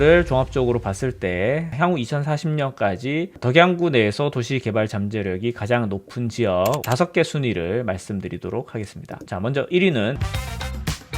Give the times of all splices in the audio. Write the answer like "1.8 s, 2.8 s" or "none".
10.2 s

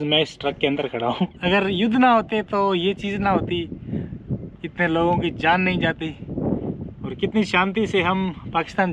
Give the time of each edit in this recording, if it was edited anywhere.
1.3 s

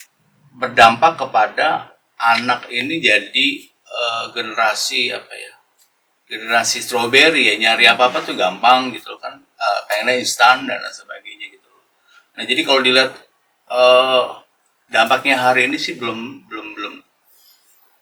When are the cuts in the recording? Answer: none

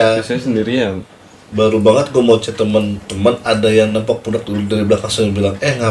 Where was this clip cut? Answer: none

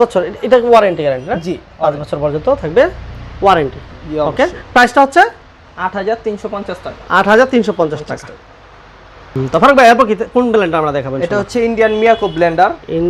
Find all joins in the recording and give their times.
none

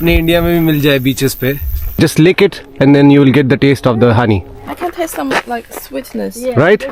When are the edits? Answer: 2.0 s, 4.6 s

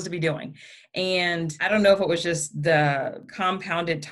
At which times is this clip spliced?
1.6 s, 3.2 s

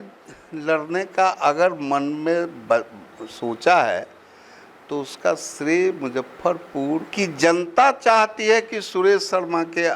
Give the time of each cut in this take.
7.1 s

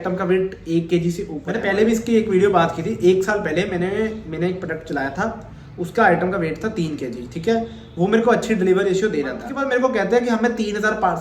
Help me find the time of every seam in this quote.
1.6 s, 9.4 s

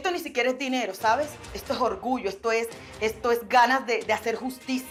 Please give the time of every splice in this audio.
none

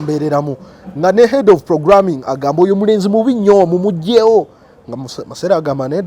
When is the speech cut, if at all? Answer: none

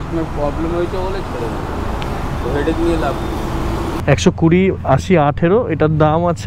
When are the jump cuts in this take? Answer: 3.9 s

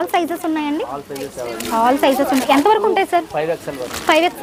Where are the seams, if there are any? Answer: none

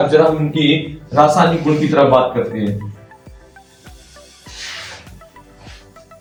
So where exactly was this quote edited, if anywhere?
none

